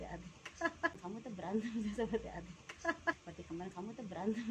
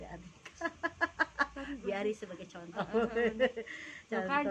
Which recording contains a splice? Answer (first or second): second